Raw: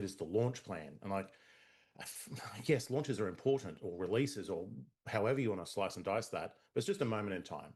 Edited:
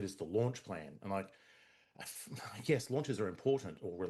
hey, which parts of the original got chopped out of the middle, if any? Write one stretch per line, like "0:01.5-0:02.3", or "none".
none